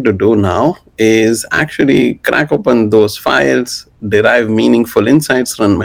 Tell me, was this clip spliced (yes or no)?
no